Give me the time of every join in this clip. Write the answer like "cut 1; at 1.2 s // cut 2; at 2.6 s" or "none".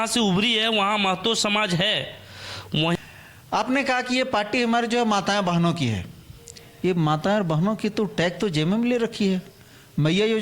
cut 1; at 3.0 s